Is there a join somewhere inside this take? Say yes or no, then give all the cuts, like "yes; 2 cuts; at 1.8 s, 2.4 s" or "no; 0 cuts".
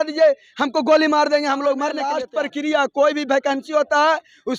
yes; 1 cut; at 2.2 s